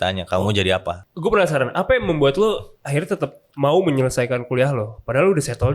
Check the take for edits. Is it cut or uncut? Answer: cut